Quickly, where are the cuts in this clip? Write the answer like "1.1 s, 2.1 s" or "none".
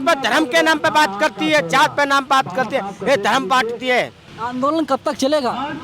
4.2 s

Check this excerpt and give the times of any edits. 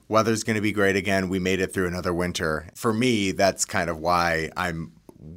2.7 s

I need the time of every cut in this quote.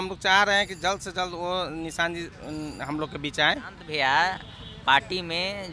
3.8 s

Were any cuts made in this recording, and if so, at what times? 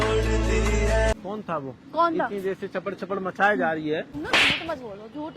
1.1 s, 4.1 s

